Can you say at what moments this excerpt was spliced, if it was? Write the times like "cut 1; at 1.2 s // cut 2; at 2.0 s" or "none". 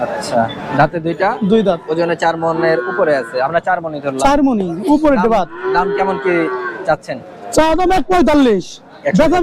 none